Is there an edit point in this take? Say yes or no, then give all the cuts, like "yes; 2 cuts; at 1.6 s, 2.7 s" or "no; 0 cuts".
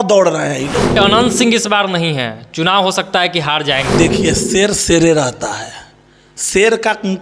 yes; 2 cuts; at 1.0 s, 3.9 s